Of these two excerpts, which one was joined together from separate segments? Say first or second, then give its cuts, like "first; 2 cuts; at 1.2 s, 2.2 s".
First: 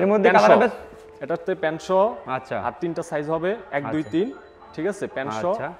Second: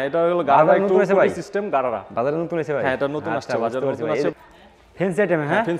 second; 1 cut; at 4.3 s